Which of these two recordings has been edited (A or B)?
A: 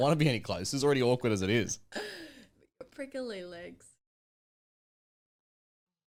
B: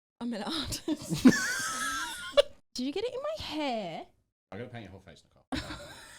B